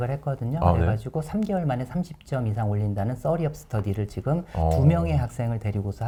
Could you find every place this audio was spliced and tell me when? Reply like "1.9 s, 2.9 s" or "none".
none